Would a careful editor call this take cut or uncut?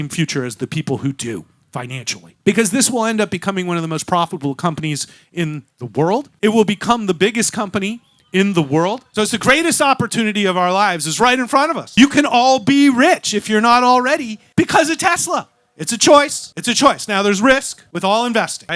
cut